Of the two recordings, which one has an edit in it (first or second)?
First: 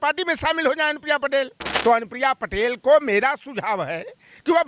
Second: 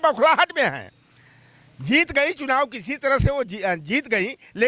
first